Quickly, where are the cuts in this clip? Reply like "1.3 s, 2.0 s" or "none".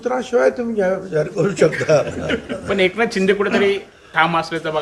none